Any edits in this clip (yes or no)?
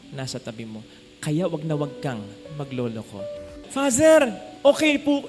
yes